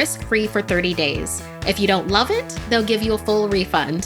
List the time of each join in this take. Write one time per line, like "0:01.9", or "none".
none